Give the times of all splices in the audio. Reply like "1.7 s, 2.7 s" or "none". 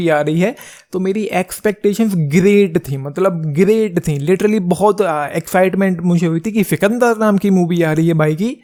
none